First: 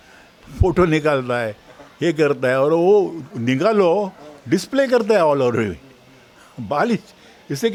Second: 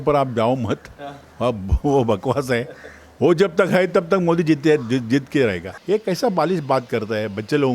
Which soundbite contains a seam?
second; 1 cut; at 5.7 s

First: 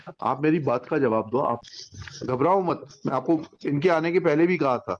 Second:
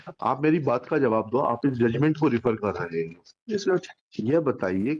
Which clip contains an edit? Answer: first; 1 cut; at 1.6 s

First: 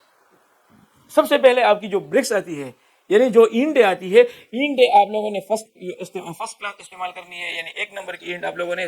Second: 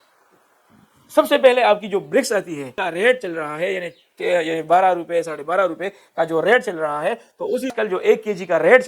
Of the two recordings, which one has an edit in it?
second; 2 cuts; at 2.8 s, 7.7 s

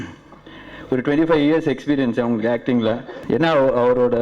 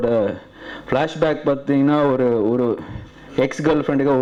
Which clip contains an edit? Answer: first; 1 cut; at 3.1 s

